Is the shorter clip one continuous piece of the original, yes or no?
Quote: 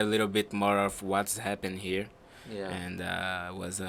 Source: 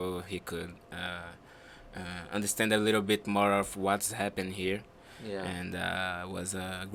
yes